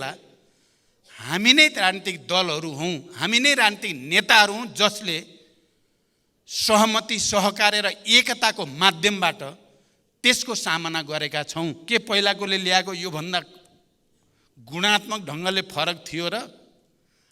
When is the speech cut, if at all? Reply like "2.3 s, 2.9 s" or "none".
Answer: 11.8 s